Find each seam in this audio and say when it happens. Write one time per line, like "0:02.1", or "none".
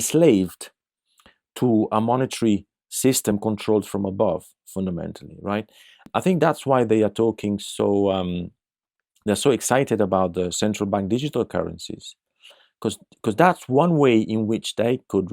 0:06.0